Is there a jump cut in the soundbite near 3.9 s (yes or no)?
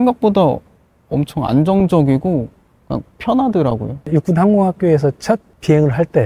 yes